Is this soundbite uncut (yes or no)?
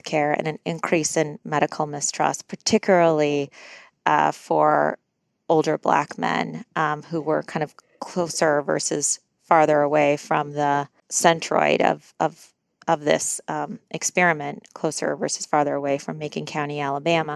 yes